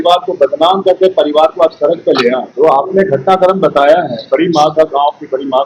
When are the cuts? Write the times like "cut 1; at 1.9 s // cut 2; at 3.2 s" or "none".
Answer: cut 1; at 2.5 s